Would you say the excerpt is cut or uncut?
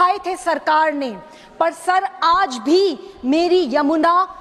uncut